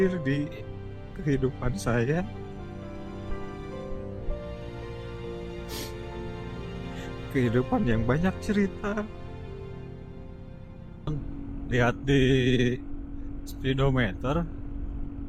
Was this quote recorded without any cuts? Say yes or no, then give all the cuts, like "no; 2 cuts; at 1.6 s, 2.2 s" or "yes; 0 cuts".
no; 1 cut; at 11.1 s